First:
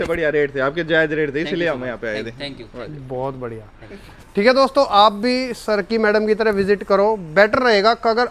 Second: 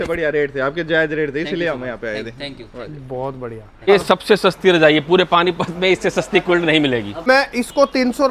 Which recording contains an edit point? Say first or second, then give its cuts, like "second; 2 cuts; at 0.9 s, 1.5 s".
second; 2 cuts; at 3.9 s, 7.2 s